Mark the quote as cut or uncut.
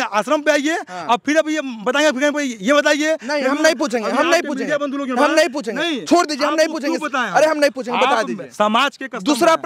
uncut